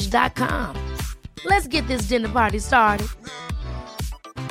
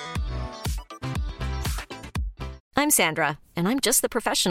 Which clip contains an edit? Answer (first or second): second